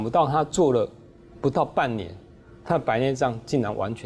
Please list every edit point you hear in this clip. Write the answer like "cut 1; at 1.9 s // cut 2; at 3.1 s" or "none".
none